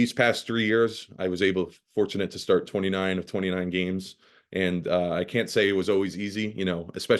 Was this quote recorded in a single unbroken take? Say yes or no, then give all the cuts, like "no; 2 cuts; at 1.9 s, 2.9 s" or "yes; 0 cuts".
yes; 0 cuts